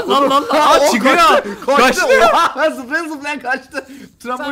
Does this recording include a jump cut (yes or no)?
no